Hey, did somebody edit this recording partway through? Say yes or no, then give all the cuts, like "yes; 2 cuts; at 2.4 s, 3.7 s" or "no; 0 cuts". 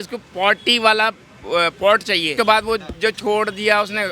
yes; 1 cut; at 2.3 s